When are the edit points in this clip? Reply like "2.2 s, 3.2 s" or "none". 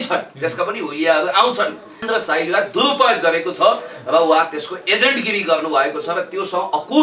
2.0 s